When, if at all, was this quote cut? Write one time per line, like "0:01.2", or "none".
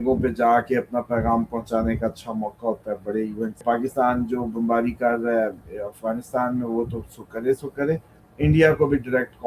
0:03.6